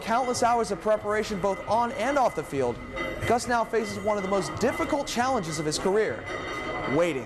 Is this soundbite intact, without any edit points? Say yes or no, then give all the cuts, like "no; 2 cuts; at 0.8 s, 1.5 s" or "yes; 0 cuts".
yes; 0 cuts